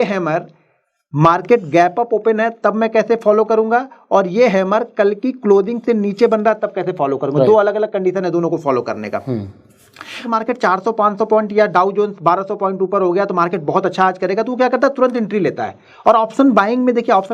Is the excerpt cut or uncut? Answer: cut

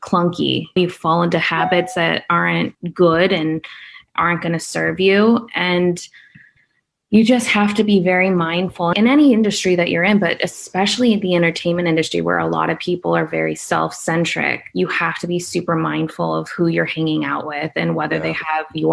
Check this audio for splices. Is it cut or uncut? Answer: cut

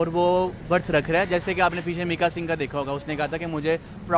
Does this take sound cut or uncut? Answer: uncut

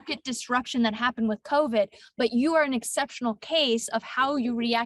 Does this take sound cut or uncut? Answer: uncut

